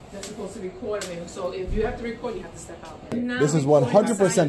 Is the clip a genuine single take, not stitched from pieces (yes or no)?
no